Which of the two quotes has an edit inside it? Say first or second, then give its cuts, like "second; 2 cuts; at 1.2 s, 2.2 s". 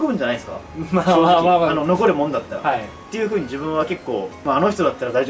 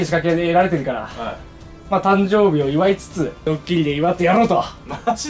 second; 1 cut; at 3.4 s